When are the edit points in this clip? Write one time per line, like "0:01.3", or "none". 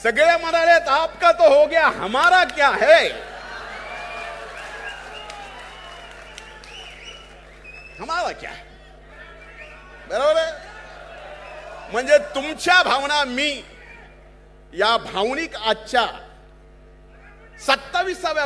none

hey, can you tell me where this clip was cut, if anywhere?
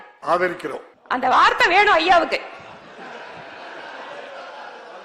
0:00.9

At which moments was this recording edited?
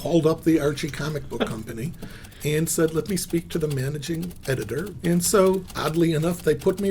0:04.9

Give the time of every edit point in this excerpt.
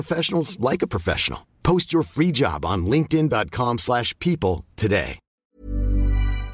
0:05.2

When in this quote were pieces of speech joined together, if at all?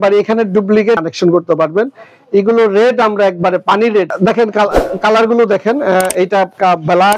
0:01.0
0:04.1

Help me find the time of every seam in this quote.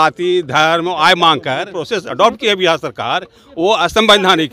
0:01.8

